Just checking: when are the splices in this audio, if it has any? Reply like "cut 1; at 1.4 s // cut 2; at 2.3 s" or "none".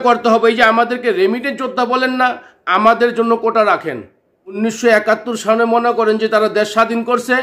cut 1; at 4.6 s